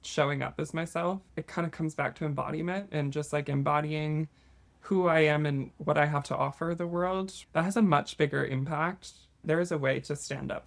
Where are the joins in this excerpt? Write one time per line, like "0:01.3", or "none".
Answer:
0:01.2
0:07.4
0:09.4